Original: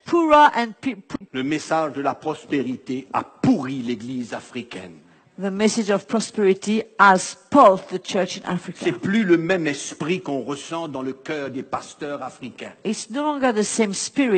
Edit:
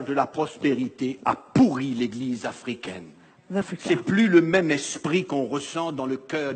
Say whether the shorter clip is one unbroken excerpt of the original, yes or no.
no